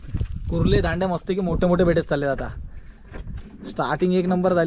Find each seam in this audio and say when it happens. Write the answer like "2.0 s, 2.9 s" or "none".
none